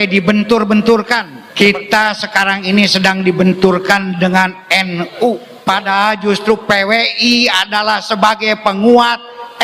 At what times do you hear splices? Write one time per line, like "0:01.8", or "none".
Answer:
0:01.4
0:05.5